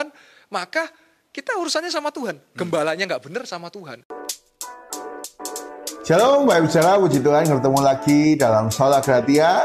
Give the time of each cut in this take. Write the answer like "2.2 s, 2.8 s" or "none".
4.0 s